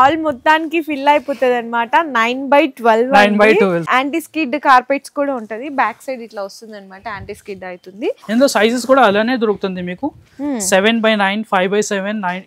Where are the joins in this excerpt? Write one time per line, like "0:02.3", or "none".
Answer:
0:03.9
0:08.2

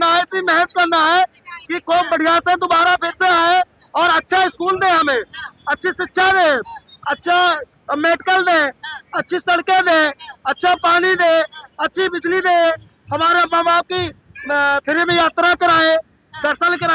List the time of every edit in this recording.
none

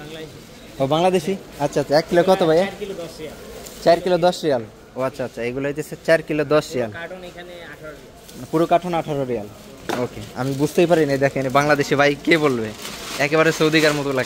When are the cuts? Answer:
none

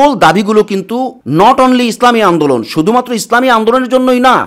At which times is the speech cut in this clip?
0:01.2

